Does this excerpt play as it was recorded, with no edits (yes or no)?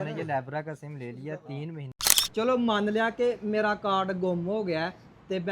no